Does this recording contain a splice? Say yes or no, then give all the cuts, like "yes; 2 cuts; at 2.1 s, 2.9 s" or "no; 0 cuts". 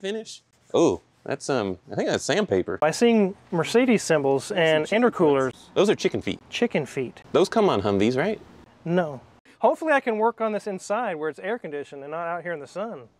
yes; 4 cuts; at 2.8 s, 6.5 s, 7.2 s, 9.5 s